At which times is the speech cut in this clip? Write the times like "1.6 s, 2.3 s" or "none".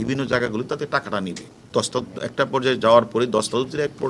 1.6 s